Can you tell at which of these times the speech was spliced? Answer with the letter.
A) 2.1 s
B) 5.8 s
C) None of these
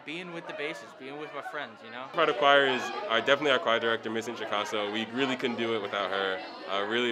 A